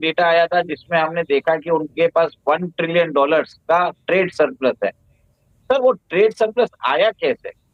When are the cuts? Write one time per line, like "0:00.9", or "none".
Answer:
none

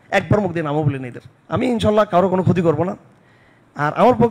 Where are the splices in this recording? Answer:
0:01.6

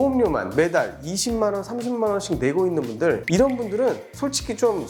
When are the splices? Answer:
none

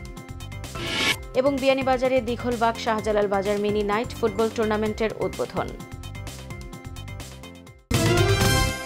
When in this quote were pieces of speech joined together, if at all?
0:07.9

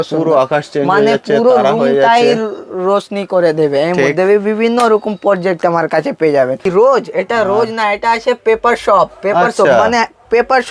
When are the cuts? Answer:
0:06.7

